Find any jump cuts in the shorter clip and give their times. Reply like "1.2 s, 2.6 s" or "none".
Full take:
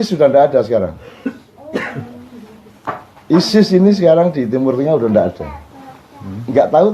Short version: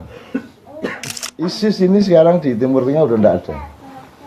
1.5 s